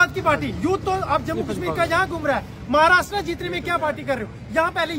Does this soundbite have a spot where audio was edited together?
no; 0 cuts

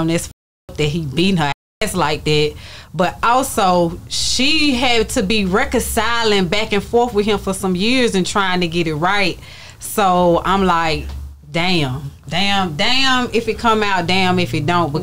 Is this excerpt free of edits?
yes; 0 cuts

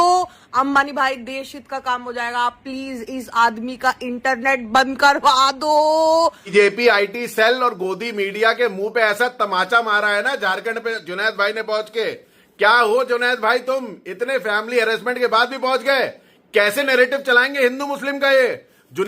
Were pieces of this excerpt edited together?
yes; 1 cut; at 6.5 s

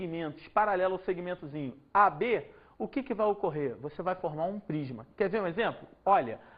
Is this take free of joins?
yes; 0 cuts

